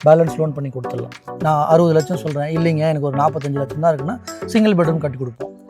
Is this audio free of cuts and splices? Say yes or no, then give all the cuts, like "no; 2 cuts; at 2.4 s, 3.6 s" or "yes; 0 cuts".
no; 1 cut; at 1.3 s